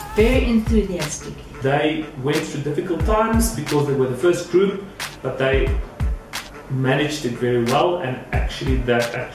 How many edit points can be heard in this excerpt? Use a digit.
1